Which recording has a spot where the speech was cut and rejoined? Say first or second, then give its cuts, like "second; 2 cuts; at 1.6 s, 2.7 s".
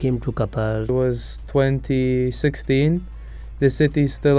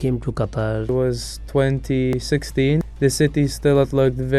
second; 1 cut; at 2.4 s